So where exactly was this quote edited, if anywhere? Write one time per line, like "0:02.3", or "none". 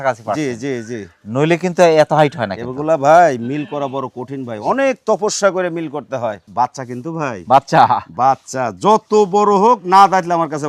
0:06.4